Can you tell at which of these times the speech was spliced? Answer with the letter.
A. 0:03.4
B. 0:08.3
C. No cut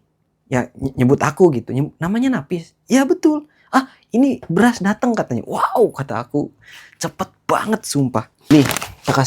B